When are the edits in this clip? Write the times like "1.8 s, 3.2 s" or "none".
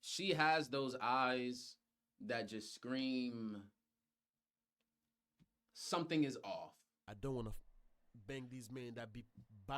7.1 s

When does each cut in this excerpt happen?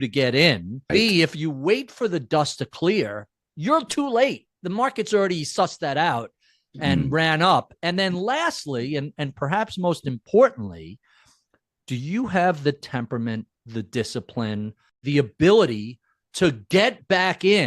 0.9 s, 14.9 s

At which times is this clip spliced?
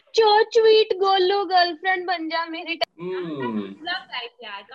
2.8 s

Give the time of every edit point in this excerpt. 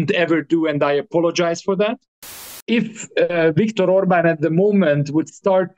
2.5 s

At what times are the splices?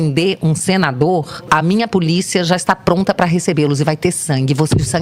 none

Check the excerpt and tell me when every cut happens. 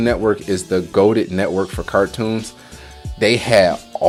none

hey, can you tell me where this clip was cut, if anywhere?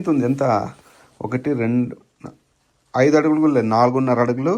none

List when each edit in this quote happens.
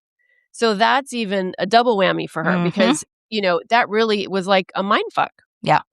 none

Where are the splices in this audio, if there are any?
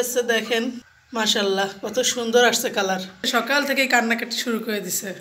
0.9 s, 3.3 s

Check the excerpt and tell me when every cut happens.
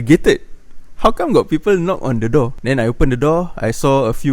2.6 s

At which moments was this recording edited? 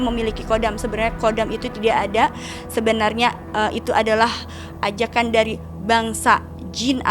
none

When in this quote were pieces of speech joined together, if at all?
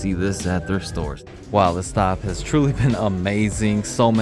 1.2 s

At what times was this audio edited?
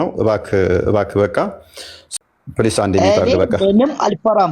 2.0 s

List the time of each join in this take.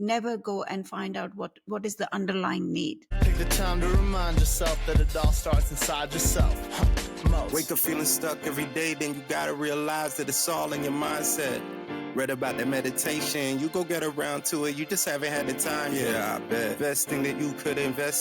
3.1 s

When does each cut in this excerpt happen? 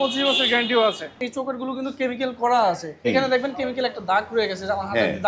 1.2 s, 2.9 s

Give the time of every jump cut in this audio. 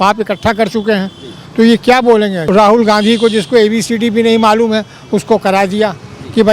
2.4 s

